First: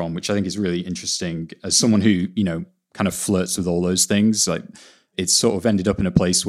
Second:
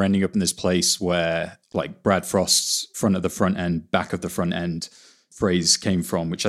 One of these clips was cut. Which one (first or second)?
second